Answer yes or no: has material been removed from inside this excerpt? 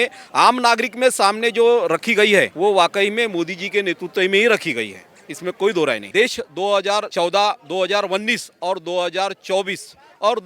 yes